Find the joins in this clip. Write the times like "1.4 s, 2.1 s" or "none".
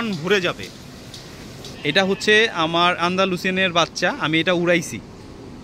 1.7 s